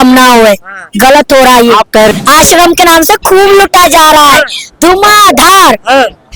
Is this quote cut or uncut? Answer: cut